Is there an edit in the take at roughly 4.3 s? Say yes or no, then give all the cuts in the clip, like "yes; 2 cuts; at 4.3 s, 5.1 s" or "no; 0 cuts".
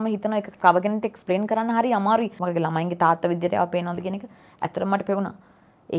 no; 1 cut; at 2.4 s